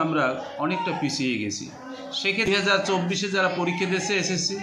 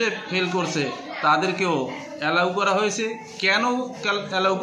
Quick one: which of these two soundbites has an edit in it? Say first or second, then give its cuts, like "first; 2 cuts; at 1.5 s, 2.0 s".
first; 1 cut; at 2.5 s